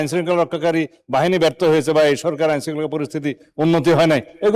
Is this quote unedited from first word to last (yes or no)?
yes